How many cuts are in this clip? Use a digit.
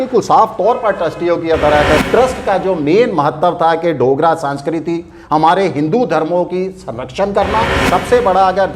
2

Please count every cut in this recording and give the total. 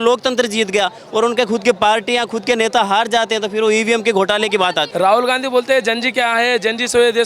1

